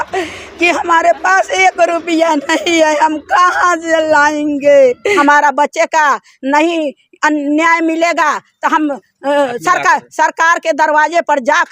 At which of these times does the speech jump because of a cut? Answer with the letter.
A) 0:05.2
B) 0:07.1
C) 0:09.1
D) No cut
A